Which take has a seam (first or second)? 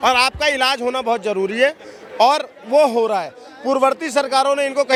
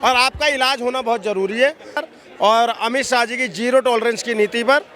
second